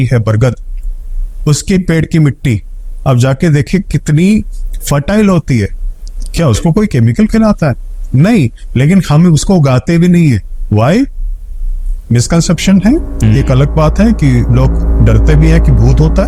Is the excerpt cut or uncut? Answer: uncut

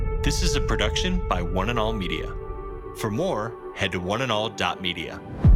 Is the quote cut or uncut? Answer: uncut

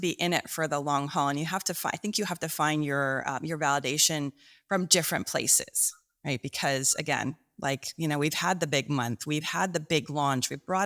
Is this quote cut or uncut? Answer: uncut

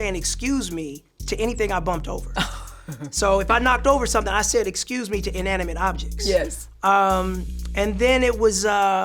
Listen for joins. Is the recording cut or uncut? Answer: uncut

